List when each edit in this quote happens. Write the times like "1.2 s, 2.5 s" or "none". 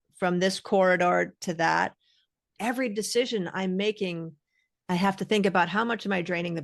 2.6 s

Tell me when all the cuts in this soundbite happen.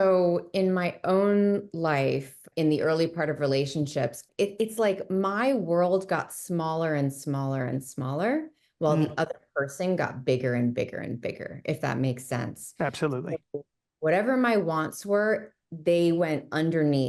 2.4 s, 4.3 s

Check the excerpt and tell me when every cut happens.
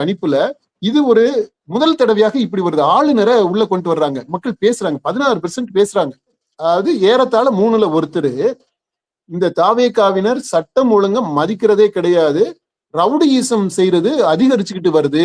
6.5 s

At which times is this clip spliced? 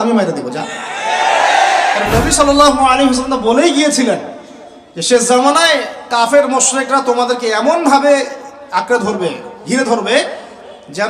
2.0 s

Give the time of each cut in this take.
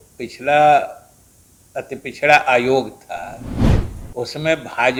none

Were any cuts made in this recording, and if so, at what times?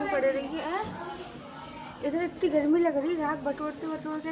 none

